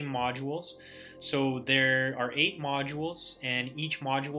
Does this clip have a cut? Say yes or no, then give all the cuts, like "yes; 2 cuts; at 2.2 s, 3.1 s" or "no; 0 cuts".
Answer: no; 0 cuts